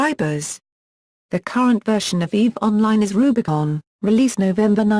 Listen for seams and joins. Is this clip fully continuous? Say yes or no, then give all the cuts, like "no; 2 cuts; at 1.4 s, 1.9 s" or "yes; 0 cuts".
no; 1 cut; at 1.0 s